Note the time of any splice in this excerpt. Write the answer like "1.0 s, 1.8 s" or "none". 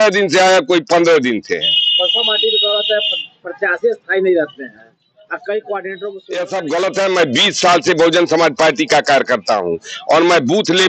6.2 s